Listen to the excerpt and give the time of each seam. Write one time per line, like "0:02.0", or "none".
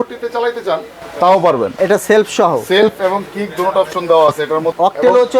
0:01.7